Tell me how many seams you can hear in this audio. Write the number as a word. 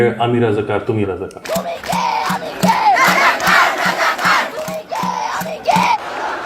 one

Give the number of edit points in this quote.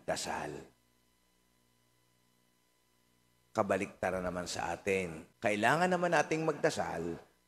one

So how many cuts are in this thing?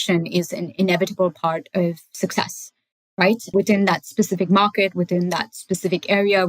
one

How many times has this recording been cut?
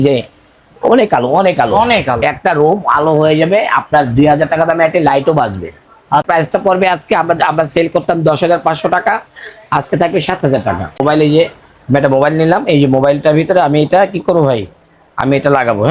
two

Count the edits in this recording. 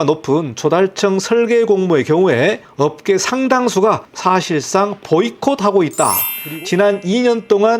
three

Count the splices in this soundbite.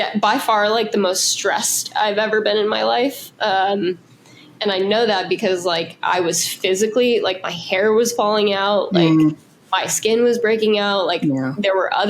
zero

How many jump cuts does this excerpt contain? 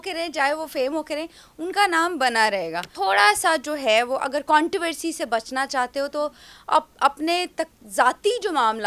one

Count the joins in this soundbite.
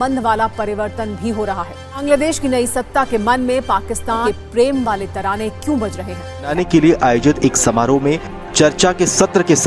three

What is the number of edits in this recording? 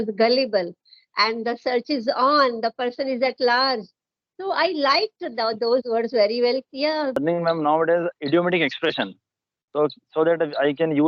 one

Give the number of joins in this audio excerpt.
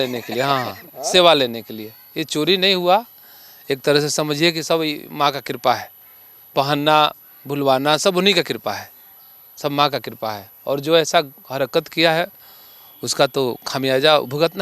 zero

